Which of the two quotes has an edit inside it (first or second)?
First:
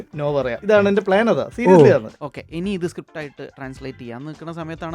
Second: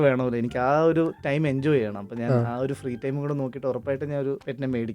first